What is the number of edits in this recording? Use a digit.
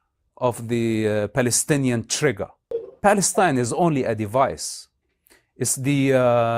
1